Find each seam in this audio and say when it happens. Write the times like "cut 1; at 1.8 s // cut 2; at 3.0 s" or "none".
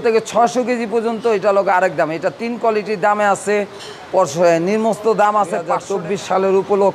cut 1; at 5.8 s